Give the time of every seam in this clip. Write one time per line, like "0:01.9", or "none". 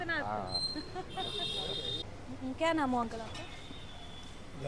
none